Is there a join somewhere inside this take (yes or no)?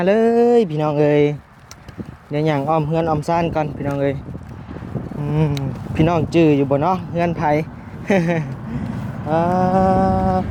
no